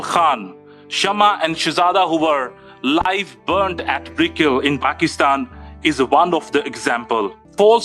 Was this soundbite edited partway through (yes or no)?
no